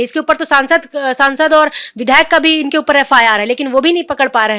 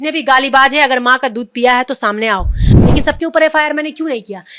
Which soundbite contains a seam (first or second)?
second